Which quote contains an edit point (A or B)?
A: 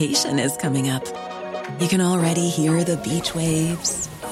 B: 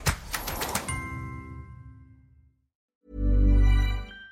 B